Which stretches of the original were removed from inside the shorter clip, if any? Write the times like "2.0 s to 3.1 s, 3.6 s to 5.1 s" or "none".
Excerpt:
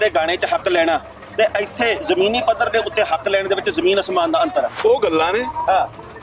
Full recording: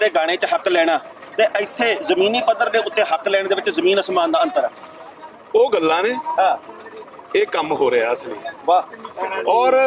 4.7 s to 5.4 s

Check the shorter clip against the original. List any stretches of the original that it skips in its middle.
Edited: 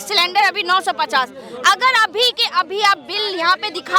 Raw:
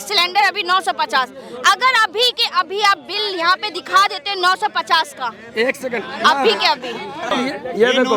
none

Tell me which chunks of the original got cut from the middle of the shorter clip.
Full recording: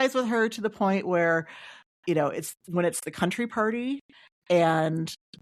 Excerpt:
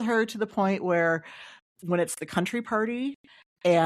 1.9 s to 2.5 s

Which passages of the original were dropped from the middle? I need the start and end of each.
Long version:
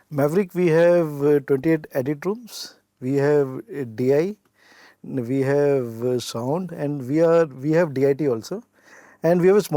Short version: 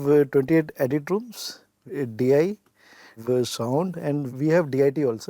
2.9 s to 3.6 s, 5.0 s to 5.9 s, 7.1 s to 7.5 s

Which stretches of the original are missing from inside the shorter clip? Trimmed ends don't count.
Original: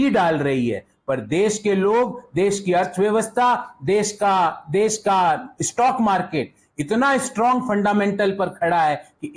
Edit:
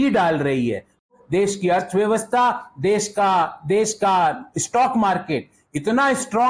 1.1 s to 2.2 s

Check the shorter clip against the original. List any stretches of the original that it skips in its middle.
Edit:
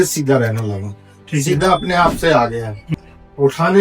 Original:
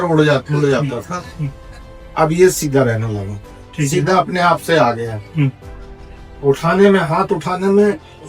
5.2 s to 5.8 s

